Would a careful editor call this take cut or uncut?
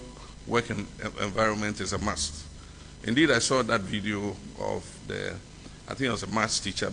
uncut